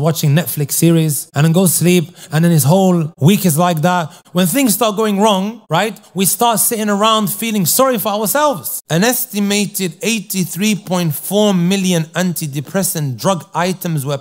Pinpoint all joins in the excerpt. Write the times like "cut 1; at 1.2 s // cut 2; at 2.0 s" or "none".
cut 1; at 1.3 s // cut 2; at 3.1 s // cut 3; at 4.2 s // cut 4; at 5.6 s // cut 5; at 8.7 s